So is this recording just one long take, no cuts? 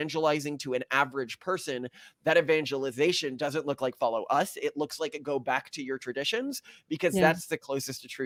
yes; 0 cuts

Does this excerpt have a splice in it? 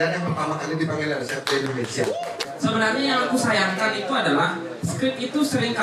yes; 1 cut; at 2.4 s

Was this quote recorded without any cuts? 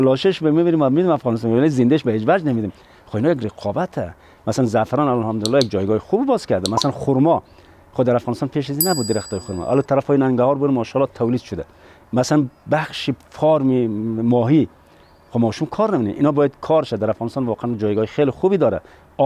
yes; 0 cuts

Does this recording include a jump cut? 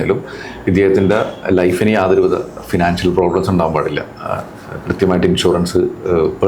no; 0 cuts

